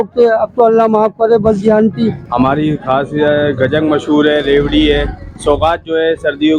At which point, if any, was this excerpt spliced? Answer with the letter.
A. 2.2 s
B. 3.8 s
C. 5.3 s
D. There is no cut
A